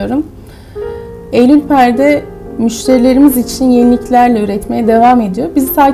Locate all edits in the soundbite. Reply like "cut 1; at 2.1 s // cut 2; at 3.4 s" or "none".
none